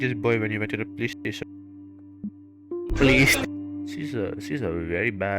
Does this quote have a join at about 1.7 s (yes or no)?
no